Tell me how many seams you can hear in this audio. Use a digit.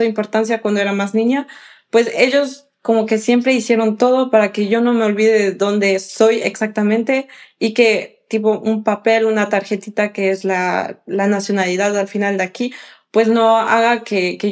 0